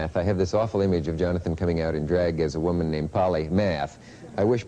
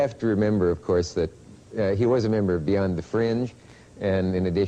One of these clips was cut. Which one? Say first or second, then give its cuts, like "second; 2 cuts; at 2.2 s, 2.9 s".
first; 1 cut; at 3.2 s